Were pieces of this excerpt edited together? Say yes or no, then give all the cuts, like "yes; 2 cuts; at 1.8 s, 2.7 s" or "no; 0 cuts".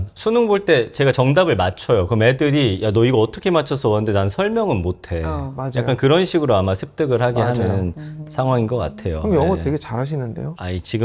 no; 0 cuts